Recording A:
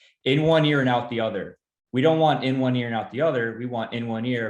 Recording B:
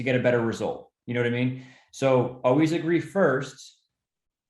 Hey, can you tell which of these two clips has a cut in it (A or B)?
B